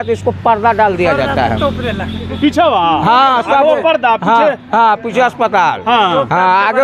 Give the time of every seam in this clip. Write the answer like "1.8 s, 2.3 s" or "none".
none